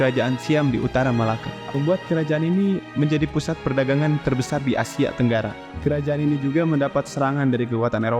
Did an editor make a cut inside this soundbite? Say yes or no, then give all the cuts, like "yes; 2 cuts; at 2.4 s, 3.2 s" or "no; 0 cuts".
yes; 2 cuts; at 1.5 s, 5.7 s